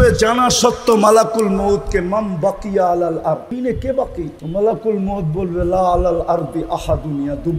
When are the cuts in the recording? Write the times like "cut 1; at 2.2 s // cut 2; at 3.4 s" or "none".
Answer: cut 1; at 3.5 s // cut 2; at 4.4 s